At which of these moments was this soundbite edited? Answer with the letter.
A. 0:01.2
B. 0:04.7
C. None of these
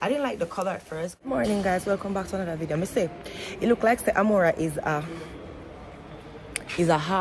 A